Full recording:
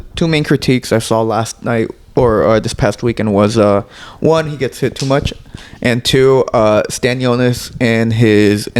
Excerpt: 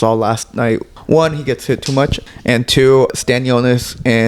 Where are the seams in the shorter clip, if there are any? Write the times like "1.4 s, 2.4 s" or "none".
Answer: 0.9 s, 2.3 s, 3.1 s